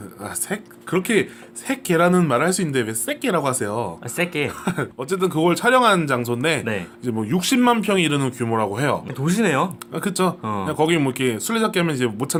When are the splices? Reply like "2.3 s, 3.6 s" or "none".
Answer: none